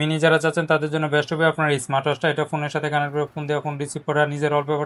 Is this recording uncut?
yes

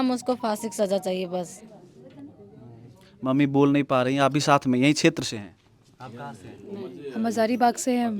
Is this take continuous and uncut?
yes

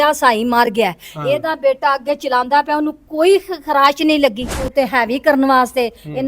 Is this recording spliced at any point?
yes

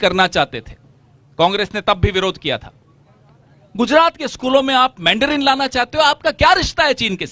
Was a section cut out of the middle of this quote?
no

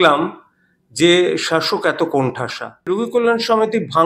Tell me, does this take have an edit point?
yes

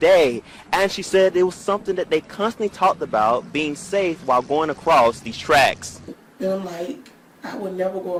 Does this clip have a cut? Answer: no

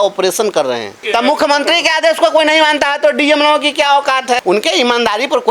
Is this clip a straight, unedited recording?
no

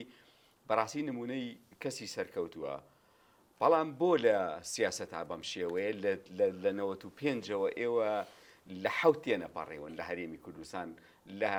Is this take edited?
no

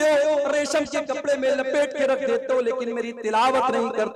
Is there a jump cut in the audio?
no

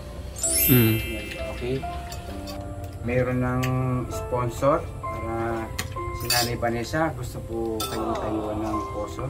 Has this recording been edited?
yes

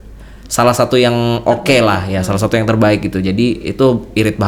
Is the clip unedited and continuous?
yes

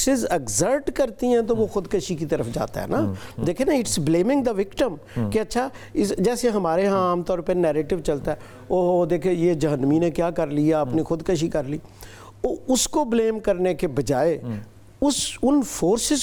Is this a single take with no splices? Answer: yes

